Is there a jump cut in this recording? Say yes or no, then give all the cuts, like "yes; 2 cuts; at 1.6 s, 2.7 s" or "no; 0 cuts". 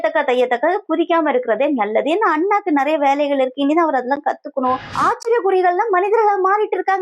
yes; 1 cut; at 4.9 s